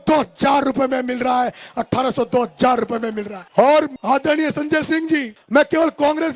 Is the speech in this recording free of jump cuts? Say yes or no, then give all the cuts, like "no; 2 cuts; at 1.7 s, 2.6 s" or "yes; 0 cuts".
yes; 0 cuts